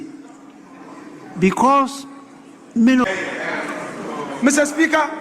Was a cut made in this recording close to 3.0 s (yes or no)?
yes